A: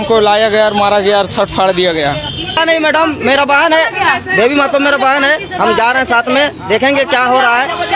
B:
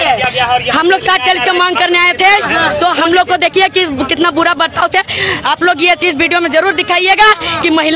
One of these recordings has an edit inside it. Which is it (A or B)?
A